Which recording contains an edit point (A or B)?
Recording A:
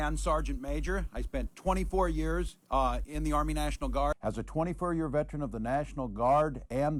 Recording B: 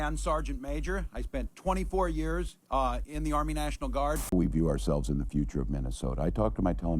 B